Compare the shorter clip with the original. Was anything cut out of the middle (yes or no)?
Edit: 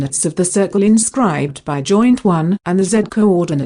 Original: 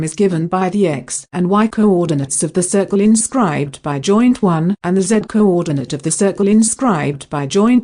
no